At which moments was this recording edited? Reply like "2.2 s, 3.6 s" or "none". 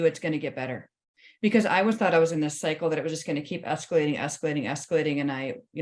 none